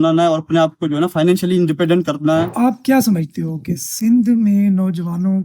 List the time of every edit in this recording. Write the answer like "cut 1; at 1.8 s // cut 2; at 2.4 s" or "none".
cut 1; at 2.5 s